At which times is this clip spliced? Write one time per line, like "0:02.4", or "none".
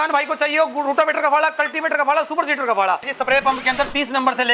0:03.1